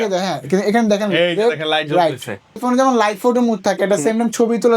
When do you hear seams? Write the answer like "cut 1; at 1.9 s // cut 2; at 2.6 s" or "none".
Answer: cut 1; at 2.6 s